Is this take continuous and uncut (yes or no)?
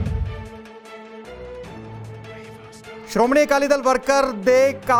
yes